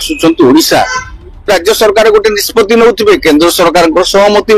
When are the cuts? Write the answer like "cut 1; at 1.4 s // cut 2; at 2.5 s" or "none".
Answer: cut 1; at 1.5 s